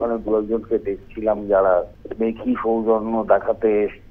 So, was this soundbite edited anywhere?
yes; 1 cut; at 2.0 s

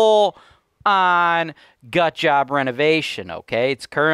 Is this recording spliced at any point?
no; 0 cuts

